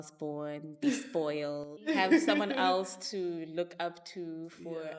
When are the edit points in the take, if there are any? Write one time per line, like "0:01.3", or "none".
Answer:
0:01.7